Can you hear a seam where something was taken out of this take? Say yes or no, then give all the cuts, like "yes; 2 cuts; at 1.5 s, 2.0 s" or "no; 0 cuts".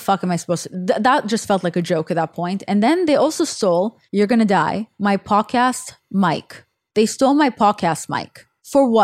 yes; 2 cuts; at 4.0 s, 4.9 s